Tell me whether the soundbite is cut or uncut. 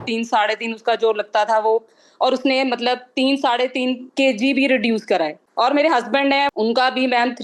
cut